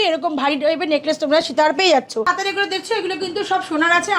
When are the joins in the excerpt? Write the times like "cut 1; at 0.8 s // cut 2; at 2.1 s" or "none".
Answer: cut 1; at 2.3 s